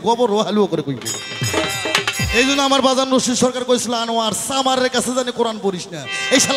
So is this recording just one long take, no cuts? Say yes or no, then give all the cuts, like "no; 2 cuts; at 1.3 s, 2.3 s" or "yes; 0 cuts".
yes; 0 cuts